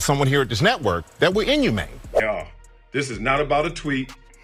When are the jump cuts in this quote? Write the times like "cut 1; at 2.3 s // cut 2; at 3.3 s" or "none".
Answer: none